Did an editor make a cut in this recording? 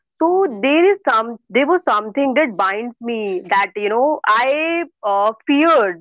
no; 0 cuts

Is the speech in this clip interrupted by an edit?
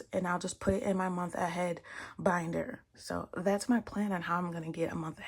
no; 0 cuts

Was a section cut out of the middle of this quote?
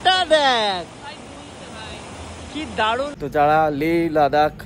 yes; 1 cut; at 3.1 s

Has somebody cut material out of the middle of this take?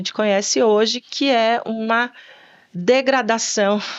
no; 0 cuts

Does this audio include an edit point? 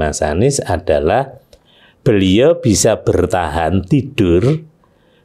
no; 0 cuts

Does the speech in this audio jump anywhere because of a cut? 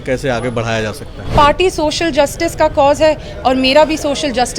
yes; 1 cut; at 1.3 s

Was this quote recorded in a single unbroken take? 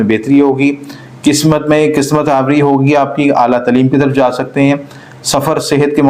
yes; 0 cuts

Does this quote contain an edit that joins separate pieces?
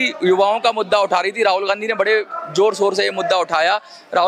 no; 0 cuts

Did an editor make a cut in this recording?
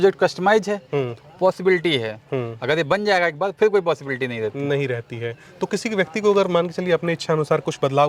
no; 0 cuts

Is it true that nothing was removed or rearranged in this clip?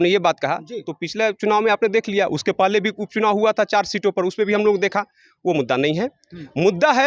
yes; 0 cuts

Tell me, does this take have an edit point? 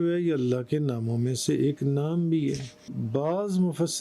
yes; 1 cut; at 2.9 s

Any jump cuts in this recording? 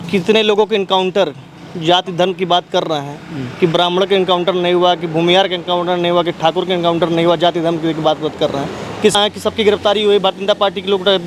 yes; 1 cut; at 9.2 s

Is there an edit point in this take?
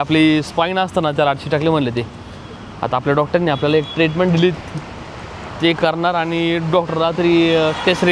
no; 0 cuts

